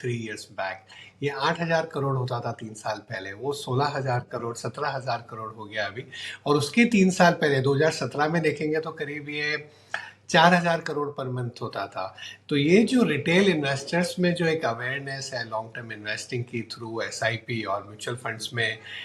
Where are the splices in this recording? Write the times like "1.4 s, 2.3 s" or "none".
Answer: none